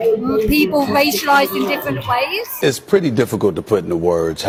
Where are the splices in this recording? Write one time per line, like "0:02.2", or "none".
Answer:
none